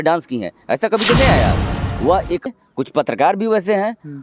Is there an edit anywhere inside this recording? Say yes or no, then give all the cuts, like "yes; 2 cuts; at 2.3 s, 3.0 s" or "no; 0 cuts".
yes; 1 cut; at 2.5 s